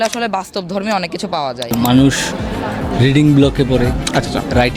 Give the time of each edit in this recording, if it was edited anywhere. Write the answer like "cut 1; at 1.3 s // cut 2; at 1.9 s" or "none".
cut 1; at 1.7 s